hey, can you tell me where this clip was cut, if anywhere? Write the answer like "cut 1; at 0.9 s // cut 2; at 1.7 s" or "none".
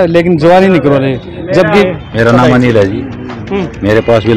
cut 1; at 1.8 s